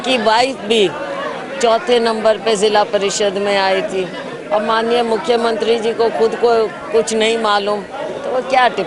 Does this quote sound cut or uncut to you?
uncut